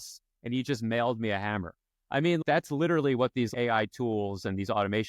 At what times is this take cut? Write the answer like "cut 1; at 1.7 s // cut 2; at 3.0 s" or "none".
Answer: cut 1; at 2.4 s // cut 2; at 3.5 s